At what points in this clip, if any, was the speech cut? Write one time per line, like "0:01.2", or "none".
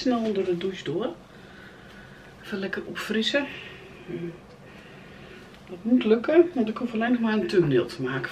none